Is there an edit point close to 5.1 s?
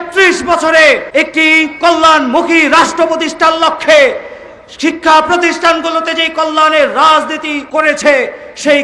no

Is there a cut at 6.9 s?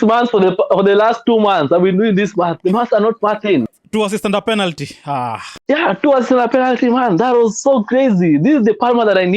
no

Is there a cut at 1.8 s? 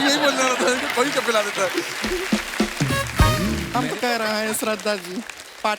no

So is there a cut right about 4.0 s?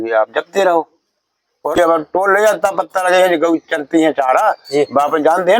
no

